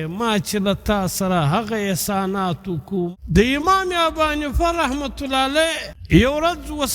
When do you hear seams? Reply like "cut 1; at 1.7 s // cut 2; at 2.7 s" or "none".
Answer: cut 1; at 3.1 s // cut 2; at 5.9 s

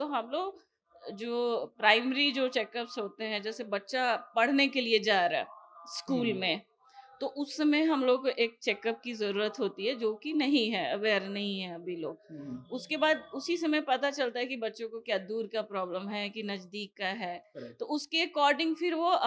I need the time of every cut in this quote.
none

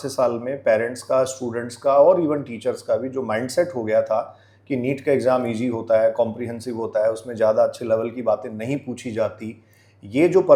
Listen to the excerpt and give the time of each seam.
none

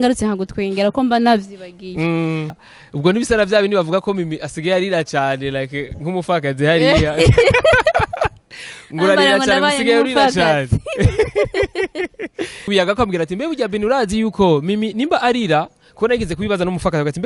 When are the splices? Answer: cut 1; at 2.6 s // cut 2; at 12.7 s

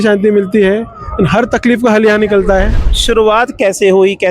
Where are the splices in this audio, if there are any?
cut 1; at 2.9 s

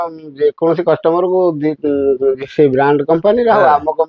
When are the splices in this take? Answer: none

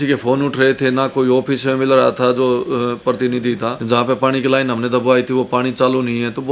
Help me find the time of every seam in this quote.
cut 1; at 3.8 s

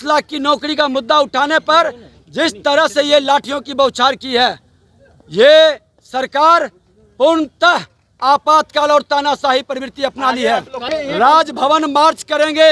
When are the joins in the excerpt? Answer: cut 1; at 10.8 s

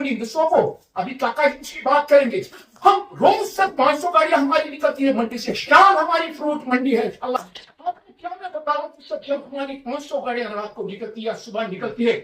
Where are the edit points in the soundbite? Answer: none

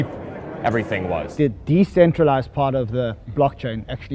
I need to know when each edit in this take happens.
cut 1; at 1.3 s // cut 2; at 3.2 s

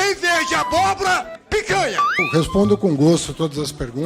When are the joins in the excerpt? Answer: cut 1; at 2.2 s

